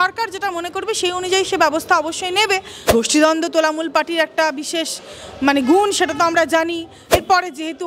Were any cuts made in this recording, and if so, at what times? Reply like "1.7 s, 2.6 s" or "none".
2.9 s, 7.1 s

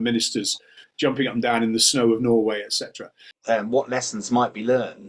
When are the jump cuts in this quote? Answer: 3.3 s

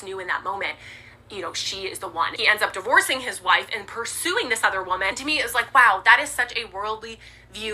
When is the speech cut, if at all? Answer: 2.4 s, 5.2 s

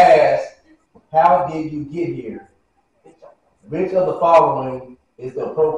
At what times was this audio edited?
none

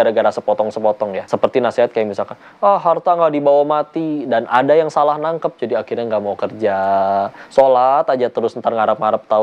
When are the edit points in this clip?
1.2 s

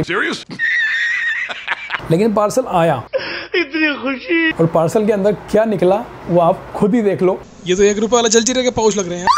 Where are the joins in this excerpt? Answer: 1.9 s, 4.5 s, 7.4 s

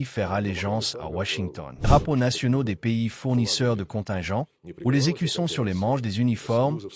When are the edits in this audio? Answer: 1.8 s

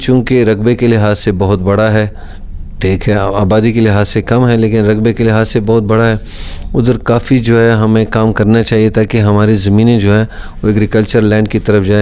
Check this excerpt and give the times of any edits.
none

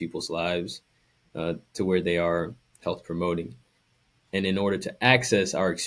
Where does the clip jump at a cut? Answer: none

